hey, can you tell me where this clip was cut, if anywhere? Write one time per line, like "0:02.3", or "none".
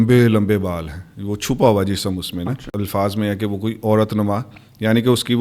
0:02.8